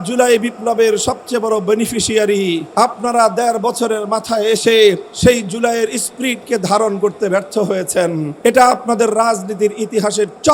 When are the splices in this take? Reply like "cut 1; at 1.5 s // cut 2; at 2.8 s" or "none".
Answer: cut 1; at 2.7 s // cut 2; at 5.1 s // cut 3; at 8.3 s